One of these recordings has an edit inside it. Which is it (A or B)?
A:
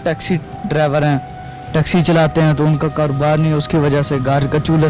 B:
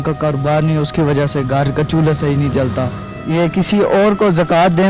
B